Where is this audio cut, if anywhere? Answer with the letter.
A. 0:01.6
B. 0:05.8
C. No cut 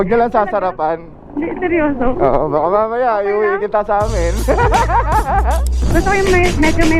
B